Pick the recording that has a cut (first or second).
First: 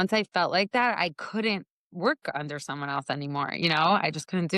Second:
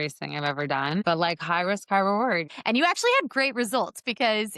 second